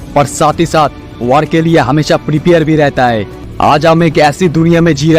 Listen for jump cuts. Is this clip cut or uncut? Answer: cut